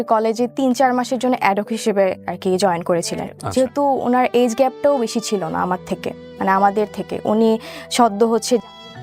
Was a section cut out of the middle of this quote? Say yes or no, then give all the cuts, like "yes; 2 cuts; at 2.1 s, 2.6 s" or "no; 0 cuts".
yes; 1 cut; at 3.4 s